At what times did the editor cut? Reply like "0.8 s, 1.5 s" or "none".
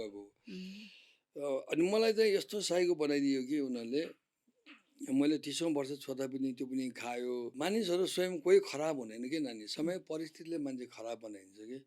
7.5 s